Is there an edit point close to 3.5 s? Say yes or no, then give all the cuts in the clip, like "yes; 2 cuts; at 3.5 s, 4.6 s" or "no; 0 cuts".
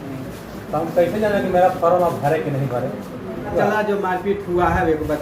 yes; 1 cut; at 3.5 s